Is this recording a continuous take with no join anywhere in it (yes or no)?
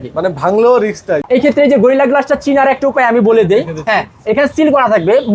no